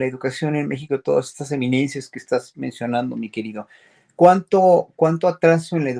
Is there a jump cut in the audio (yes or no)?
no